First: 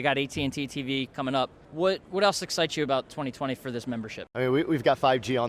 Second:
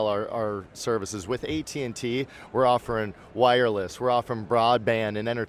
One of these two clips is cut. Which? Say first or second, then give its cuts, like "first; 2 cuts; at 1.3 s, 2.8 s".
first; 2 cuts; at 1.6 s, 4.2 s